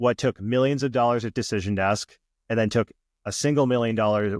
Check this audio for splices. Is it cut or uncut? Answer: uncut